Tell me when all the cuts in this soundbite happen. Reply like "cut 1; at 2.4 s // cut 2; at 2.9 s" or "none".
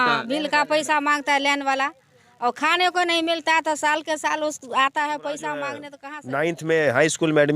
cut 1; at 5.9 s